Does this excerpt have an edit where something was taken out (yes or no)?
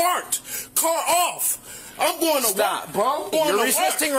yes